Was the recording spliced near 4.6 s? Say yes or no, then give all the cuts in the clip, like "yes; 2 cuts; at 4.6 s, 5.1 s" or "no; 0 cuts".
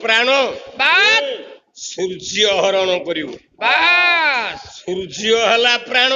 yes; 1 cut; at 4.6 s